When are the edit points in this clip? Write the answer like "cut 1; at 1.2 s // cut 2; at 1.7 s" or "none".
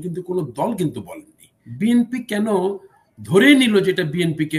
cut 1; at 1.6 s